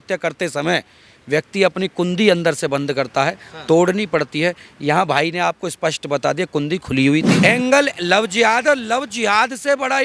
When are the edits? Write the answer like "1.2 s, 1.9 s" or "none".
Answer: 7.3 s